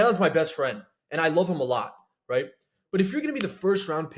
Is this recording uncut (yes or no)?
yes